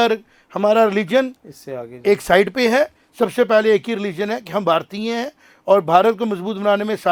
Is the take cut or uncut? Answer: uncut